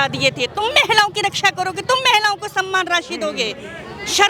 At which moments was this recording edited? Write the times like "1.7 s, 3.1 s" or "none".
none